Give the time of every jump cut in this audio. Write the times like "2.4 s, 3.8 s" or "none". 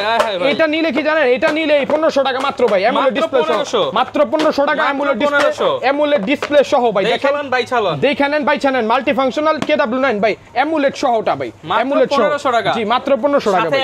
none